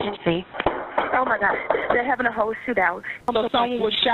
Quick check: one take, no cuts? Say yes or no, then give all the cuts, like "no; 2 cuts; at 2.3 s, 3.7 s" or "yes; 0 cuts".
no; 1 cut; at 3.1 s